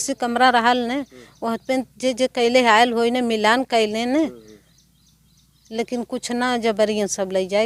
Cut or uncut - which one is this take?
uncut